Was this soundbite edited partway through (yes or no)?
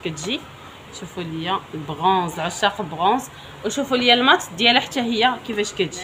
no